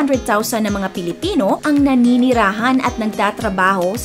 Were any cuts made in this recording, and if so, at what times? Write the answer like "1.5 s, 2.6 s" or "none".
none